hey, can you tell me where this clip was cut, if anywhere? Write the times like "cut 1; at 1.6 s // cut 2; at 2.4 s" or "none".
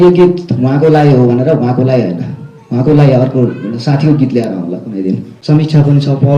cut 1; at 5.3 s

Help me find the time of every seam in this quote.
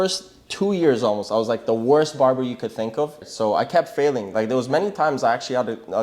cut 1; at 3.2 s

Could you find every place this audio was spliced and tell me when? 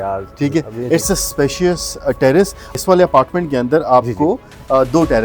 cut 1; at 2.7 s

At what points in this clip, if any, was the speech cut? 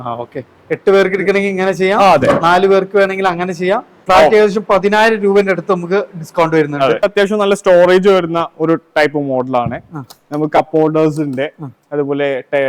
cut 1; at 4.0 s // cut 2; at 7.0 s

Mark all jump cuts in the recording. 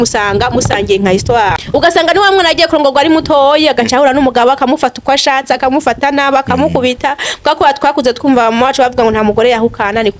cut 1; at 1.6 s

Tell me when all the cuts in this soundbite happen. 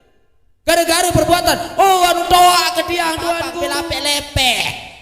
cut 1; at 3.6 s

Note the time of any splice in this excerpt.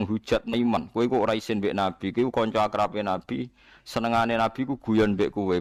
none

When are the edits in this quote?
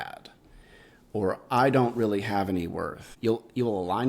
cut 1; at 3.0 s

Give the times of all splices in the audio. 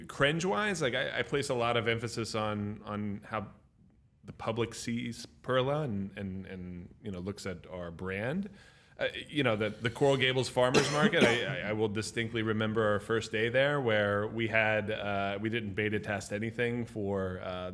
none

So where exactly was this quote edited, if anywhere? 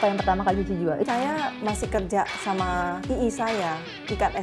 cut 1; at 1.1 s // cut 2; at 3.0 s

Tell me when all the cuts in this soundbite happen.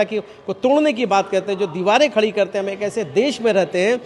none

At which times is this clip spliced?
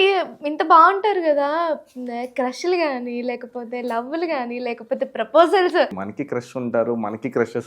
cut 1; at 6.0 s

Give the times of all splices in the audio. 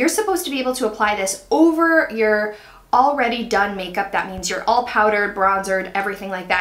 none

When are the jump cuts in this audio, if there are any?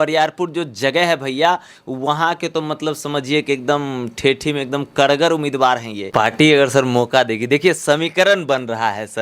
cut 1; at 6.0 s

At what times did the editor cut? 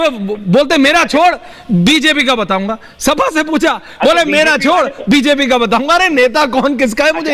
none

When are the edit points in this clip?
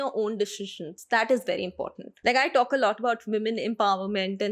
cut 1; at 2.0 s

